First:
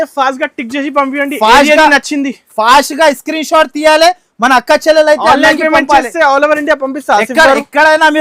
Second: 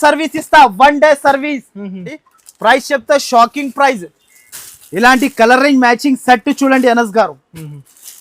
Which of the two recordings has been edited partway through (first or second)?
second